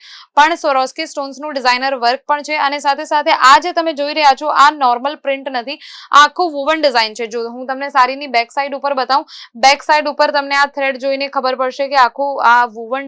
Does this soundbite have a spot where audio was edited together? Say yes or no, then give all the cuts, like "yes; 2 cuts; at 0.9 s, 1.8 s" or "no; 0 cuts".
no; 0 cuts